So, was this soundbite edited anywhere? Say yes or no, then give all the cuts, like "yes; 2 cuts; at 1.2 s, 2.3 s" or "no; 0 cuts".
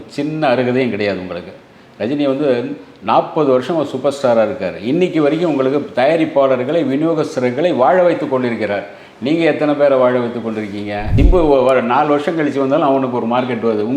yes; 1 cut; at 11.0 s